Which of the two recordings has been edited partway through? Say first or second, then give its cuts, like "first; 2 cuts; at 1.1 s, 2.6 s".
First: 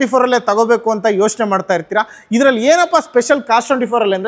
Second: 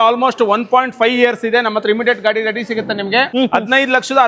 second; 1 cut; at 3.3 s